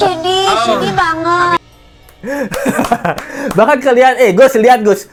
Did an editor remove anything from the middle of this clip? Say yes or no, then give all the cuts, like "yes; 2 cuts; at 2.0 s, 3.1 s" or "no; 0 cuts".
no; 0 cuts